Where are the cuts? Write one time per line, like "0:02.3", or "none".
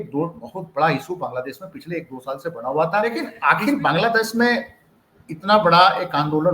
0:03.3